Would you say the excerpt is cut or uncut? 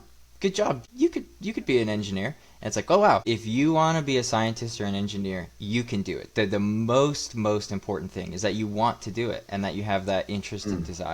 cut